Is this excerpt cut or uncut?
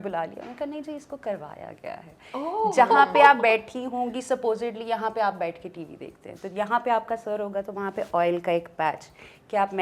uncut